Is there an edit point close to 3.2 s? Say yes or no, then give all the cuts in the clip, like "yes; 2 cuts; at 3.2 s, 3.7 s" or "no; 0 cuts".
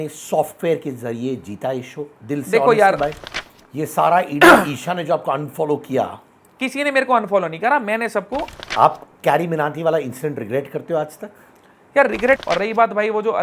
yes; 3 cuts; at 3.2 s, 8.6 s, 12.4 s